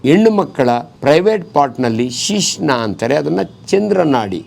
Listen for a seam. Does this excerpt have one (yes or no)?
yes